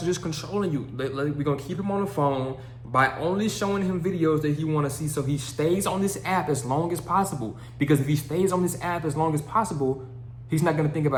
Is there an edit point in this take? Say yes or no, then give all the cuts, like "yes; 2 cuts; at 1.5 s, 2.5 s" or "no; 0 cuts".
no; 0 cuts